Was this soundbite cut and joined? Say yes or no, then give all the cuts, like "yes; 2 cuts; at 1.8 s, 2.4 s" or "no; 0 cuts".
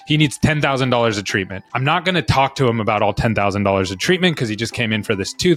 no; 0 cuts